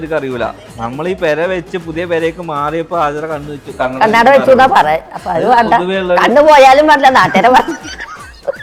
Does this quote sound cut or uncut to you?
uncut